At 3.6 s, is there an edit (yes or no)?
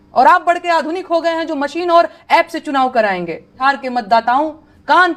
yes